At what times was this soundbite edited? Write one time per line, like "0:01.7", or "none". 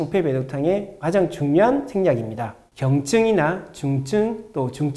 0:02.6